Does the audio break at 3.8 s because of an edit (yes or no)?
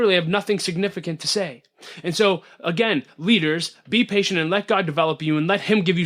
yes